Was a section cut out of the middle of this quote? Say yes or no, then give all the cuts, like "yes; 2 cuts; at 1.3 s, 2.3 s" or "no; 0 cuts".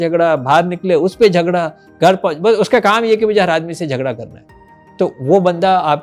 no; 0 cuts